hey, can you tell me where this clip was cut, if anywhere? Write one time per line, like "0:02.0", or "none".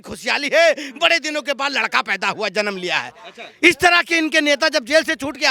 none